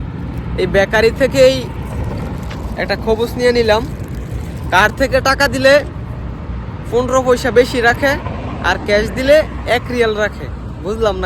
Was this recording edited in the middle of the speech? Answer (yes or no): no